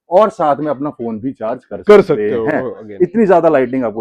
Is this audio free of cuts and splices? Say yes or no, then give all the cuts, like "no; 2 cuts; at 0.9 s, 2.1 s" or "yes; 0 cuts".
yes; 0 cuts